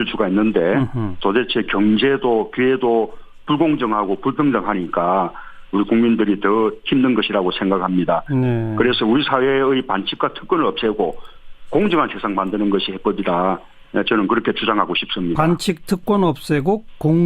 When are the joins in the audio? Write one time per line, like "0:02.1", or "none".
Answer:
0:12.0